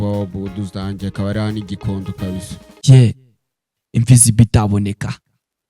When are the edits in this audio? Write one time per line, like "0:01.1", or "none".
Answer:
0:02.6